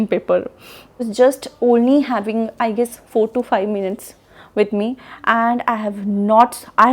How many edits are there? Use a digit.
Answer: 1